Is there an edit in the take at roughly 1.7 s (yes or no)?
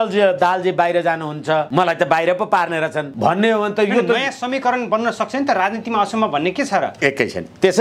yes